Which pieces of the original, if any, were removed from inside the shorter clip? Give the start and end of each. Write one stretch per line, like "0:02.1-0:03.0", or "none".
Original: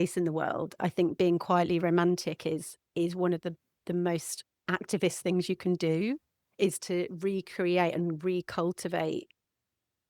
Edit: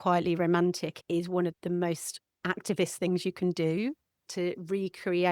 0:02.8-0:03.6
0:06.5-0:06.8